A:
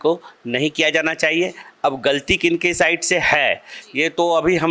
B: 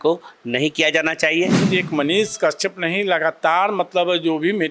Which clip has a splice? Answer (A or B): B